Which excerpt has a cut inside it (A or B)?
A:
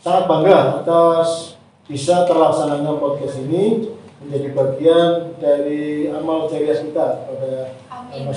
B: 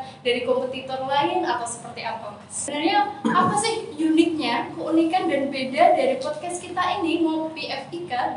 B